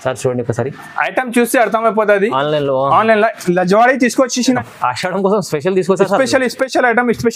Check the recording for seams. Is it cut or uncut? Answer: cut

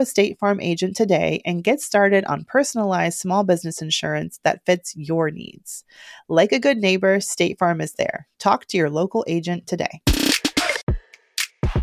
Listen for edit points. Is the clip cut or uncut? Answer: cut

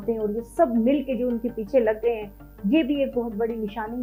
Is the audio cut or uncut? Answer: uncut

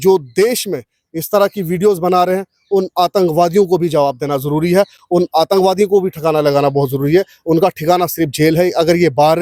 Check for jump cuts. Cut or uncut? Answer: uncut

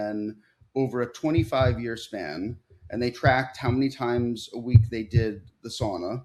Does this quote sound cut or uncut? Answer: uncut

